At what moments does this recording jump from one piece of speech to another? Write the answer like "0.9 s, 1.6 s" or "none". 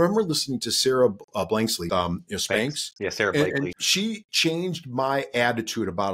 1.8 s, 3.8 s